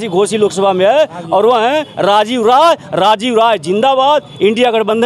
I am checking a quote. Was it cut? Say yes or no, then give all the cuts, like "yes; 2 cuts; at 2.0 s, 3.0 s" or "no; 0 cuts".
no; 0 cuts